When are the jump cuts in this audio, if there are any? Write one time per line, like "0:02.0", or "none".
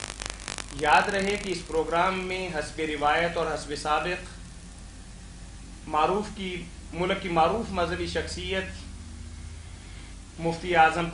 none